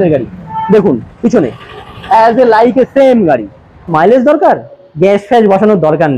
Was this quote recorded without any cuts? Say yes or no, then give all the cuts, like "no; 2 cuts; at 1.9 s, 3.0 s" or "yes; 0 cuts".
no; 1 cut; at 3.9 s